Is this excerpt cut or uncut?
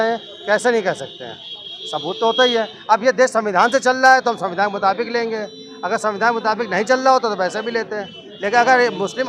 uncut